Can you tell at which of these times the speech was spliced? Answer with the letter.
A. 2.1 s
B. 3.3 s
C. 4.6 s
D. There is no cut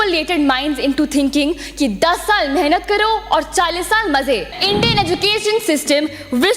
C